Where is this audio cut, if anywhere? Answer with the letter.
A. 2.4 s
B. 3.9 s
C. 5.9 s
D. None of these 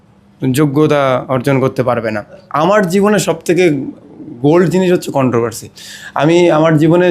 A